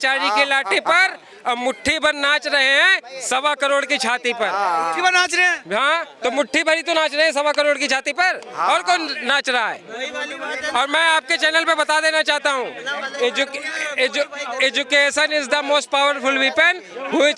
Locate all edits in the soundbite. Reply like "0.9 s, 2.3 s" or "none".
none